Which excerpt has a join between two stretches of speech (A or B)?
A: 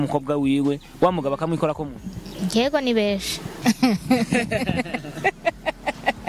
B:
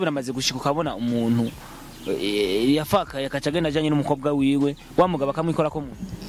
A